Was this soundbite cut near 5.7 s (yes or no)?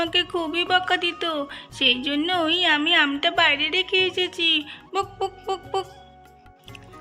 no